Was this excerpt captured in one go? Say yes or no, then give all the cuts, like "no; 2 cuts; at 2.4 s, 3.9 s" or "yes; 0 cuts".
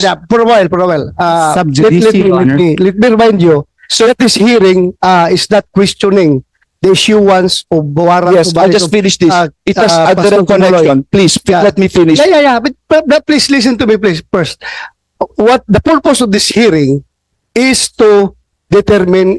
yes; 0 cuts